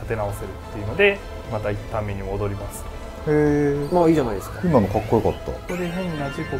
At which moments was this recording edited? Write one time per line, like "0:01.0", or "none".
0:05.6